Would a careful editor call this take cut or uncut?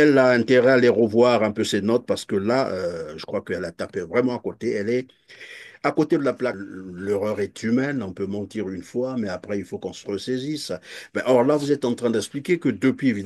cut